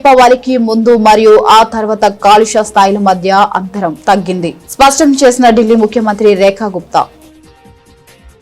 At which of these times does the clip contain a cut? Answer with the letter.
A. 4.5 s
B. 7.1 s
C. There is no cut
B